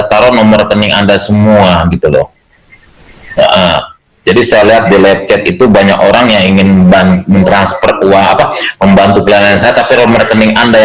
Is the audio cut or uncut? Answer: uncut